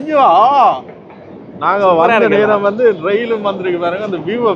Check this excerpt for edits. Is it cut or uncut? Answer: uncut